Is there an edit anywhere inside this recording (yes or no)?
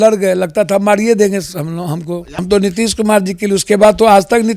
yes